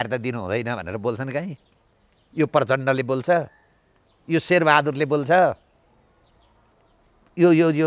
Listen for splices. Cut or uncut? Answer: uncut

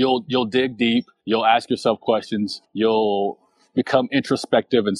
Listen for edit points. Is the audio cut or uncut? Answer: cut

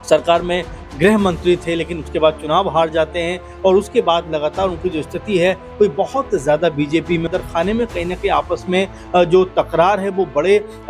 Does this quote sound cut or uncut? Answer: cut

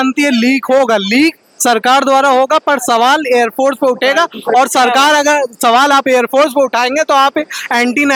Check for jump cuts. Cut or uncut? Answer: uncut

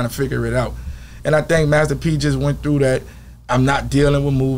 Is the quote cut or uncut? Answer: uncut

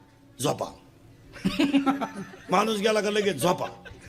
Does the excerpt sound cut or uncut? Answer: cut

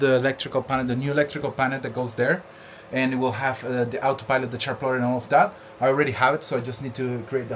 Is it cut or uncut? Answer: uncut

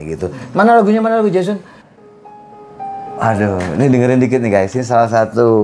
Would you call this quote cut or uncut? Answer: cut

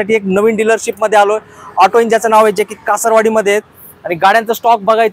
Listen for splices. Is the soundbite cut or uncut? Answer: uncut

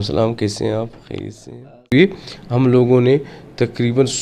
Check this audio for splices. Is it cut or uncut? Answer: cut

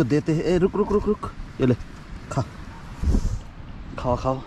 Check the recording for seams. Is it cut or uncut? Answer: uncut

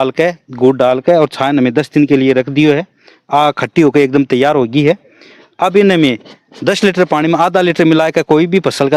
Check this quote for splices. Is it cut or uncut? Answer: uncut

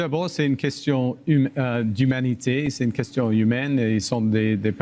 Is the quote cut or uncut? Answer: uncut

